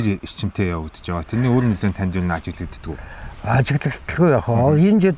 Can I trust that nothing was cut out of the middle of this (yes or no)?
yes